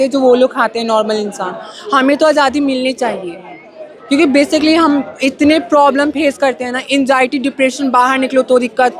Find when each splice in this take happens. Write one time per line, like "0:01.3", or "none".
none

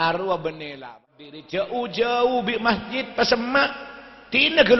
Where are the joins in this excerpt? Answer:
0:01.1

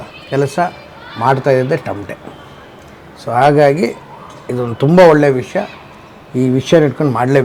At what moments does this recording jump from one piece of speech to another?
none

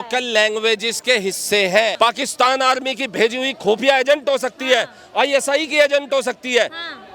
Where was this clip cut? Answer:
0:01.9

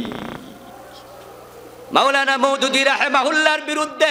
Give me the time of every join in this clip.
0:01.0

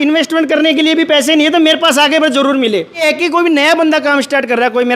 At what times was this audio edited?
0:03.0

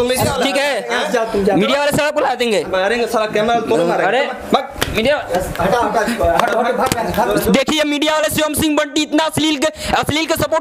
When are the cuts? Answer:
none

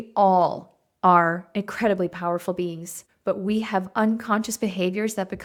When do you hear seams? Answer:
none

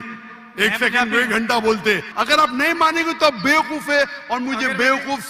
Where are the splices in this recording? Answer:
0:02.1

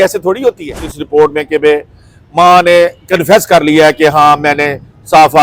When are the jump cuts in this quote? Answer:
0:01.0

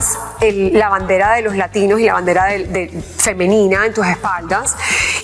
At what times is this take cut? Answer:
none

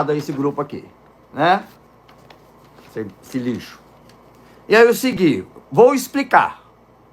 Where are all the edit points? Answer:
none

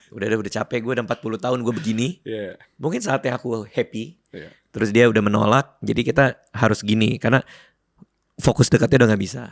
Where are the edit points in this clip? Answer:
none

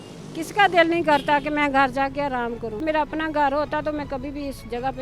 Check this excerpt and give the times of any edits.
0:02.8

